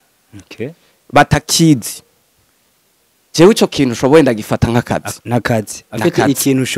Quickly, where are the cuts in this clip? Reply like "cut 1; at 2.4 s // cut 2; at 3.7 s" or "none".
none